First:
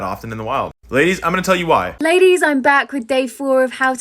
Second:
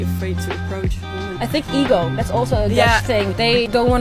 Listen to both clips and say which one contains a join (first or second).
first